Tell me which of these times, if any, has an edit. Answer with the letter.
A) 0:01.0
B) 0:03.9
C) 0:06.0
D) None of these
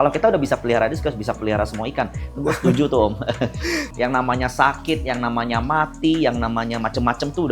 B